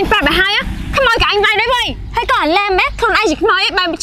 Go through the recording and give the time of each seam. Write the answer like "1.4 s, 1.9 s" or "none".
2.0 s